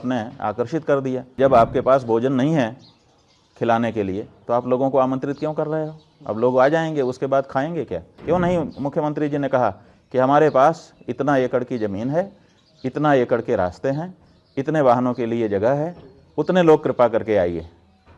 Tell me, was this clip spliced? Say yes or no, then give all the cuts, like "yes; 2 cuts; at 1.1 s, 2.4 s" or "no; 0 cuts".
yes; 2 cuts; at 1.3 s, 8.1 s